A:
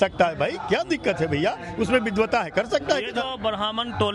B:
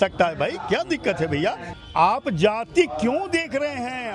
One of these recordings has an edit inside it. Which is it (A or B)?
B